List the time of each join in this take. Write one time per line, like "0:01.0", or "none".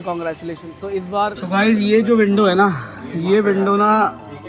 0:01.4